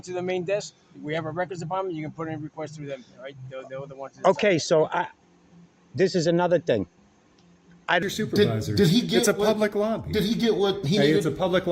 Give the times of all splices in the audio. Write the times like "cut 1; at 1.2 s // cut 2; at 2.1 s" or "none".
cut 1; at 8.0 s